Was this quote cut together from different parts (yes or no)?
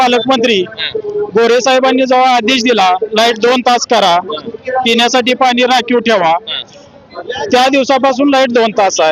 no